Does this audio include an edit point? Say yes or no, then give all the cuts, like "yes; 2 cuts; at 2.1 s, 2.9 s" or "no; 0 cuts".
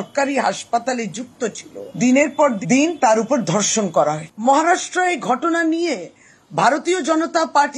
yes; 1 cut; at 4.3 s